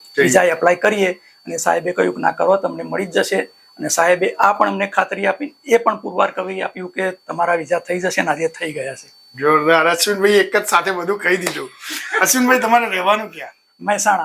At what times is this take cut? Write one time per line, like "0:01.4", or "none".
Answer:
none